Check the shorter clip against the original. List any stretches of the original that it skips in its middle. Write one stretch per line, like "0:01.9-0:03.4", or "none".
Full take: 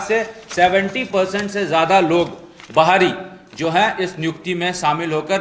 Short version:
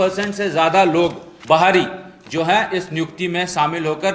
0:02.4-0:02.5